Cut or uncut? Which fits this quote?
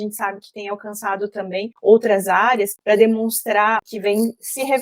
cut